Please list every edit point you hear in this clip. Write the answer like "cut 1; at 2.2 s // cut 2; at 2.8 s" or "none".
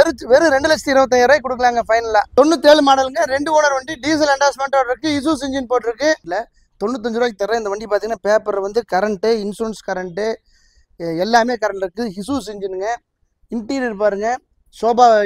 cut 1; at 2.3 s // cut 2; at 6.2 s